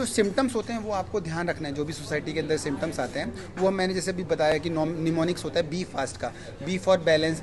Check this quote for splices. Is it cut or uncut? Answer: uncut